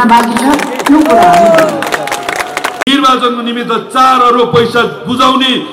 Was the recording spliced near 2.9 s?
yes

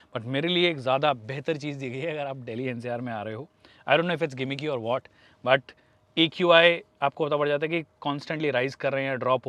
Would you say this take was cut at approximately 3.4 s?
no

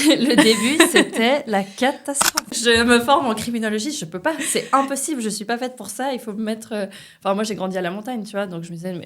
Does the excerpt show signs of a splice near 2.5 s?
yes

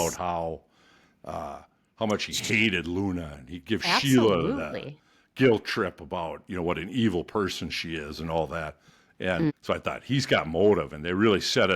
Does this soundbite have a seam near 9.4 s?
yes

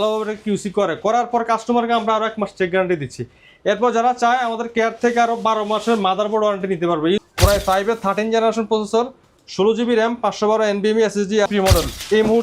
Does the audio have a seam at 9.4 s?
no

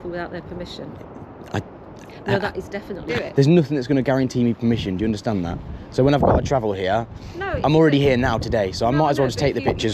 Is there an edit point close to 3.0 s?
yes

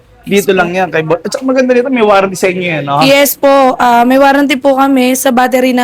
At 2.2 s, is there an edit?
no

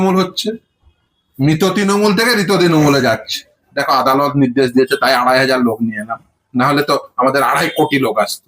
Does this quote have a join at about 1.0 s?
no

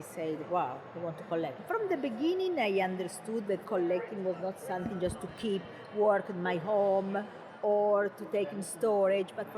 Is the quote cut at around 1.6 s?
yes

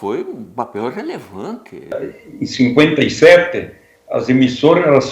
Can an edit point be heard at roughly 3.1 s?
no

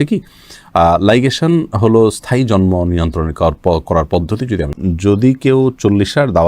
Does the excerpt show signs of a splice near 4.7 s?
yes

